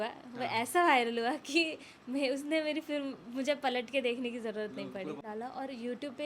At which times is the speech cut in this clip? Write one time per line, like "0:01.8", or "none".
0:05.2